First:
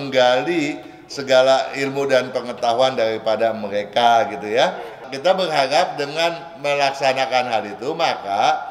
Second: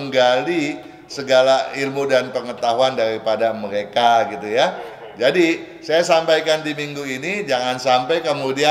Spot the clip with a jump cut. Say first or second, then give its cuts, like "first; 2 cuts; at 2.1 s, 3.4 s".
first; 1 cut; at 5.0 s